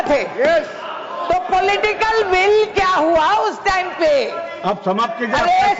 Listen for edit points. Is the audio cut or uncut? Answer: uncut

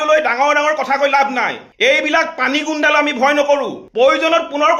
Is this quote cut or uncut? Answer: cut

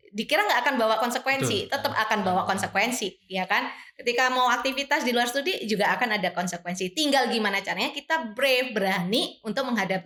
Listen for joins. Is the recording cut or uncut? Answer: uncut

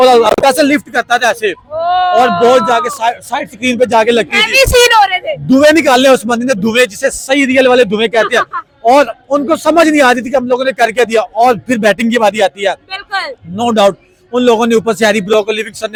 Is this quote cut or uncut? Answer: uncut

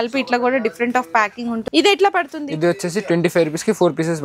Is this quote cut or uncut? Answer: cut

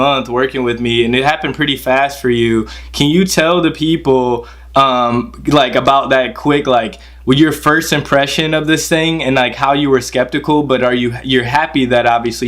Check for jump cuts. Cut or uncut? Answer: uncut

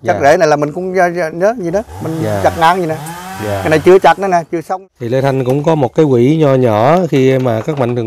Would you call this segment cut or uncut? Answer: cut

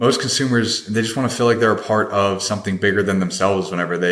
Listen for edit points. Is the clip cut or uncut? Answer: uncut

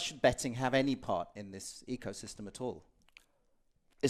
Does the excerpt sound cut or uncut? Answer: uncut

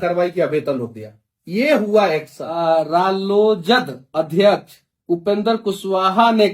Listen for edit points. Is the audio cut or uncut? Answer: cut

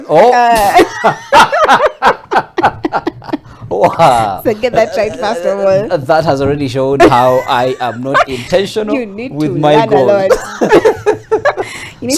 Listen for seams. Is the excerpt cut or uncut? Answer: uncut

